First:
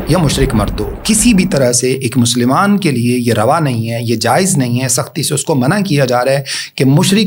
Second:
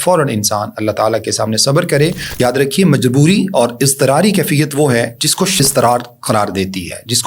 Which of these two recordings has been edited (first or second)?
second